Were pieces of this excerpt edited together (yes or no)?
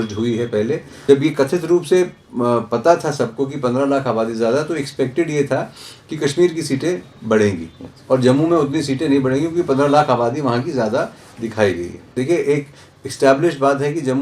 yes